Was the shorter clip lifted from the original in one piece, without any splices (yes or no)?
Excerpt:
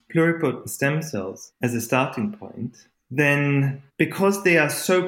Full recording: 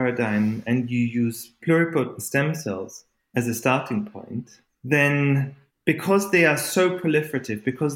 no